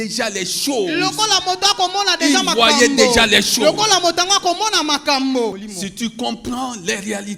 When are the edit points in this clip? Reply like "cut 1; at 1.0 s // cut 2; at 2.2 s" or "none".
cut 1; at 5.6 s